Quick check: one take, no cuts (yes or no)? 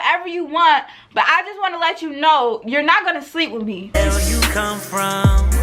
no